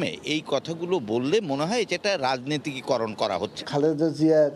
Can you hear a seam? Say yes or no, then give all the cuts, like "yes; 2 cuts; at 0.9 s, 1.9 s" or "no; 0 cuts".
yes; 1 cut; at 3.6 s